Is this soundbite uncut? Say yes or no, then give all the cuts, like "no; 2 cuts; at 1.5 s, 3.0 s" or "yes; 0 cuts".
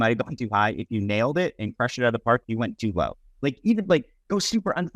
yes; 0 cuts